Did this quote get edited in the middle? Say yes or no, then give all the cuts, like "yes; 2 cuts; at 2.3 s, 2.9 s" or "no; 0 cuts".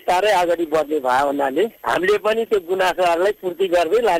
no; 0 cuts